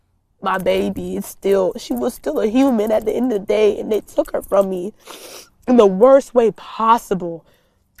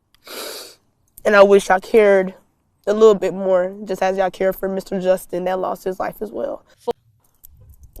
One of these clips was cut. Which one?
second; 1 cut; at 6.9 s

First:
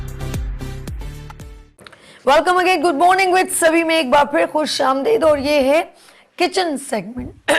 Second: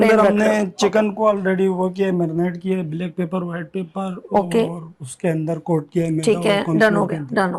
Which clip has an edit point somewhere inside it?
first; 1 cut; at 1.6 s

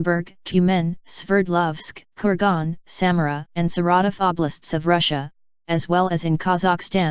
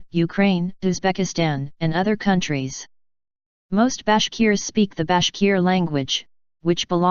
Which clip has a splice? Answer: first; 1 cut; at 5.3 s

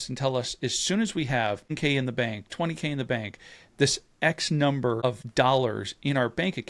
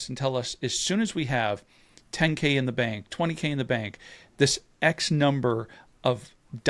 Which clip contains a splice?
first; 2 cuts; at 1.8 s, 5.2 s

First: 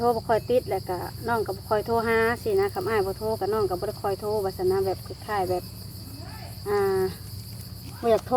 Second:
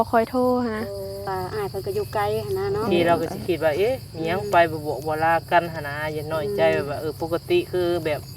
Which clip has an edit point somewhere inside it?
second; 1 cut; at 1.3 s

